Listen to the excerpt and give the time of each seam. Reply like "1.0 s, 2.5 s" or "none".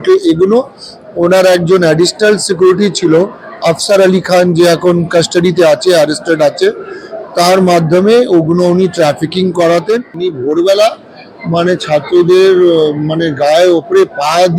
10.1 s